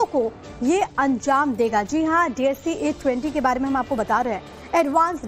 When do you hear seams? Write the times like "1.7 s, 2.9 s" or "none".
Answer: 3.9 s